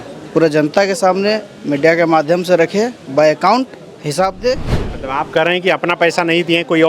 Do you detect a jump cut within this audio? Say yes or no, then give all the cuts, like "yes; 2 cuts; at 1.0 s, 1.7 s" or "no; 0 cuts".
yes; 1 cut; at 4.8 s